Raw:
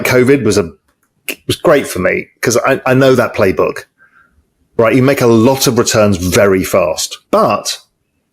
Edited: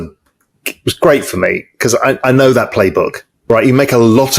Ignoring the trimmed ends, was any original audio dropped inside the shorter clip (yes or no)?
yes